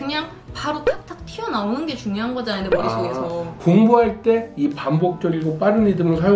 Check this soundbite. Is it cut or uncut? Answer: cut